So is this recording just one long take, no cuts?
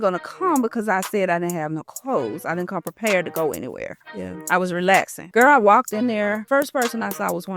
no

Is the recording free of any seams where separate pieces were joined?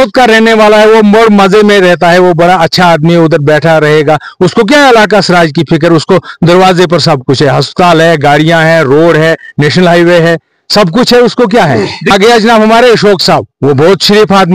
no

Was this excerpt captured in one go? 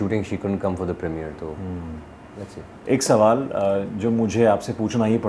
yes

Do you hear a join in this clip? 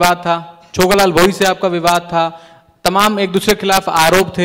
no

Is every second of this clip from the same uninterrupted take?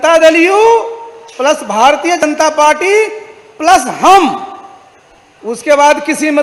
yes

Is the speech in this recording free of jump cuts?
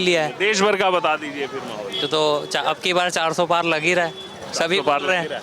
yes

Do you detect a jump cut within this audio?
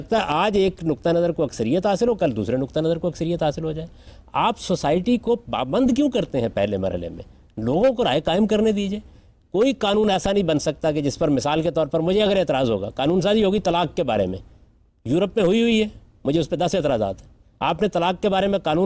no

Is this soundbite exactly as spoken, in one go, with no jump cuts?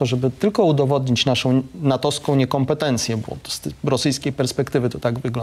yes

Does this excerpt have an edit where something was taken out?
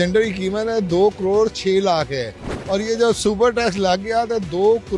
no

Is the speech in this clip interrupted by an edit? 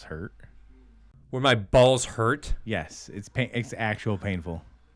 yes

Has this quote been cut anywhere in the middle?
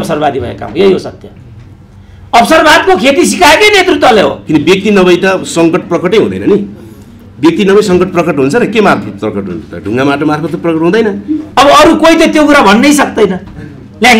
yes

